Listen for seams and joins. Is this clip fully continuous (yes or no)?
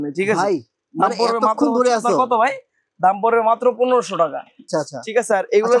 no